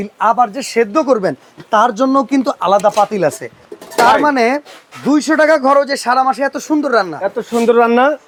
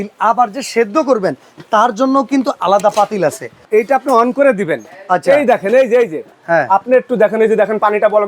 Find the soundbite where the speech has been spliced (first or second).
second